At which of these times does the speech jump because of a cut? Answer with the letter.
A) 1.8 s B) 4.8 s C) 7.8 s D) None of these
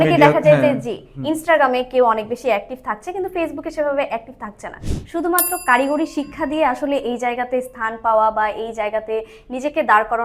B